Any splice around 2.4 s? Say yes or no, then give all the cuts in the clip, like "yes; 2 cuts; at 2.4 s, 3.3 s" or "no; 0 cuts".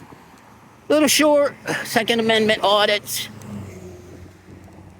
yes; 1 cut; at 2.4 s